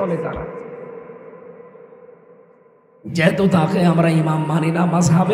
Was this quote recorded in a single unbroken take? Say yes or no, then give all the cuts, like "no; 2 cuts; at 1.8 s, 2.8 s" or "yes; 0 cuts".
yes; 0 cuts